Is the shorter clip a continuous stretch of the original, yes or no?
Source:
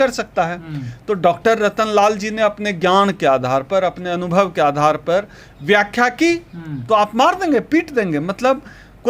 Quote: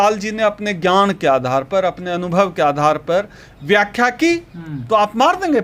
yes